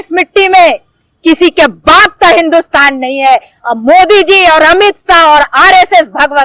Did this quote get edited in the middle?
no; 0 cuts

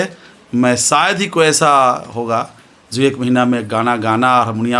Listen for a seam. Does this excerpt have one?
no; 0 cuts

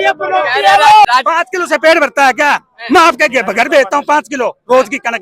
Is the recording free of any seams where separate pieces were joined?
no; 1 cut; at 1.0 s

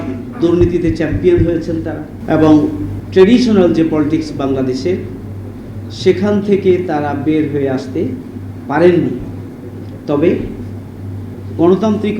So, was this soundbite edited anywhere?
yes; 2 cuts; at 2.1 s, 2.9 s

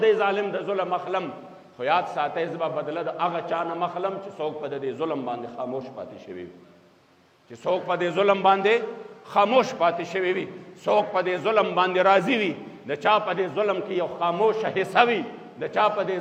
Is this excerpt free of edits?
yes; 0 cuts

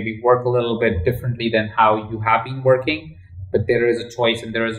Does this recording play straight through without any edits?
no; 1 cut; at 3.3 s

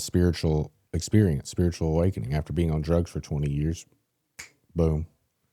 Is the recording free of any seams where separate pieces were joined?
yes; 0 cuts

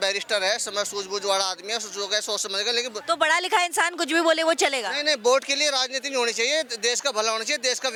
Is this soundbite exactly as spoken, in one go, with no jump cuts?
yes; 0 cuts

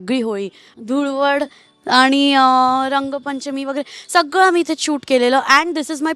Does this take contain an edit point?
no; 0 cuts

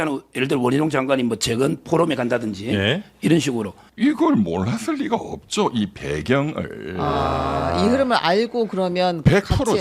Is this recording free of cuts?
no; 1 cut; at 3.8 s

